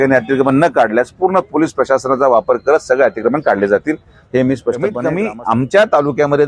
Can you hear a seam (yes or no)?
yes